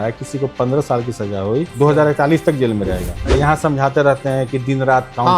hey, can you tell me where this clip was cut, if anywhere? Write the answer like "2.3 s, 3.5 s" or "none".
1.7 s, 3.2 s